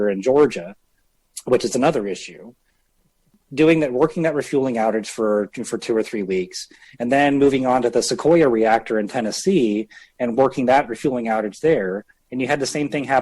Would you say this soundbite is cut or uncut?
uncut